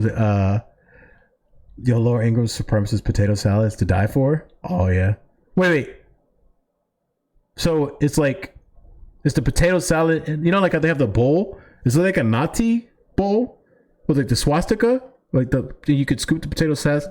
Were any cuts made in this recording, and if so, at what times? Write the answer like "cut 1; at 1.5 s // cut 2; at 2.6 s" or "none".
cut 1; at 2.0 s